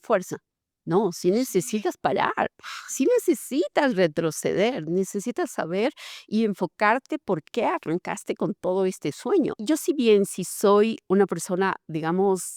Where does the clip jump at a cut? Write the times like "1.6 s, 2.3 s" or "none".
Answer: 9.6 s